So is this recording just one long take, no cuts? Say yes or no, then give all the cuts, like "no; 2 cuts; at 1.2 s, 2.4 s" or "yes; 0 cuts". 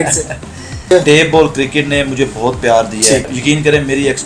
no; 2 cuts; at 0.9 s, 3.3 s